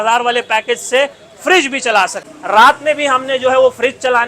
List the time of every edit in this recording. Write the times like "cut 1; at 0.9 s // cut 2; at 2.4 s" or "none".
cut 1; at 2.3 s

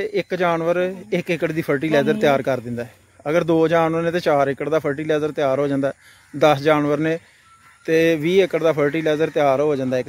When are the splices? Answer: none

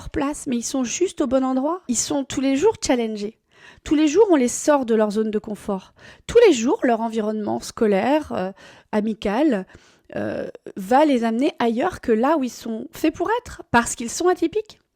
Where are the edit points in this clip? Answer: cut 1; at 1.9 s

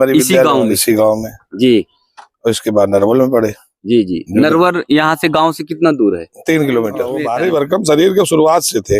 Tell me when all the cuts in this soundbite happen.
cut 1; at 7.2 s

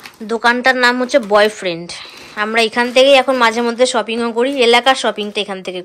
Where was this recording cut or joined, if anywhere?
none

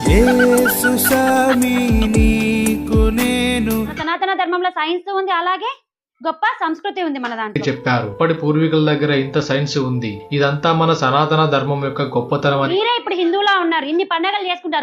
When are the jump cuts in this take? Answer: cut 1; at 4.0 s // cut 2; at 12.7 s

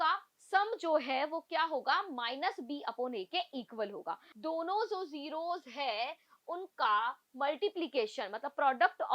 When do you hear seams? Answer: cut 1; at 4.3 s

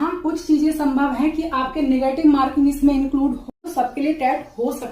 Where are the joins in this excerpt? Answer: cut 1; at 3.5 s

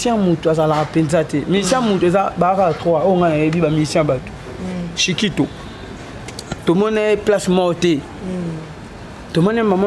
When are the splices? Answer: none

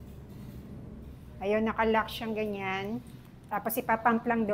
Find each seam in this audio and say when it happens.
cut 1; at 3.3 s

